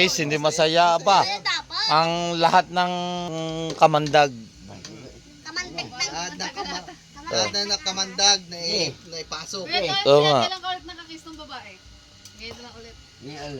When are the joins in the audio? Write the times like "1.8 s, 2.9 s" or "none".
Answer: 3.3 s